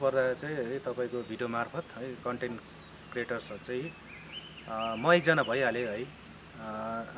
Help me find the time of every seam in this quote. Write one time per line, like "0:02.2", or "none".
none